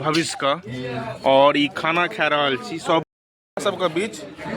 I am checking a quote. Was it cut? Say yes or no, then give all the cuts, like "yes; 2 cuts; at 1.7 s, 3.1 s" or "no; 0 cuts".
yes; 1 cut; at 3.0 s